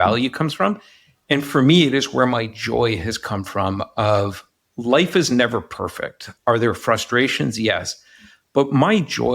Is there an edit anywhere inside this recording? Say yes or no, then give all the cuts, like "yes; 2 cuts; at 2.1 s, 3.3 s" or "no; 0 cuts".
yes; 1 cut; at 6.2 s